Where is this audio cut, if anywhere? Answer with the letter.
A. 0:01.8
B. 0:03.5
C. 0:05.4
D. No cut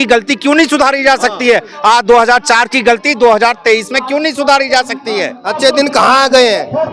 C